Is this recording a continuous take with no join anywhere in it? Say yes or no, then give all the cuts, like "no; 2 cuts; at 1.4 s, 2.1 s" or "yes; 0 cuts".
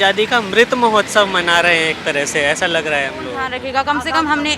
no; 1 cut; at 3.5 s